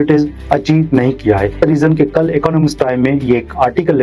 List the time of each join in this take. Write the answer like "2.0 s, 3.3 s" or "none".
1.5 s